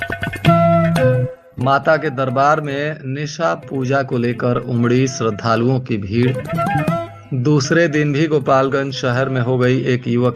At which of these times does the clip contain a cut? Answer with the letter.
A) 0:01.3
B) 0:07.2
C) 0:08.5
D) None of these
A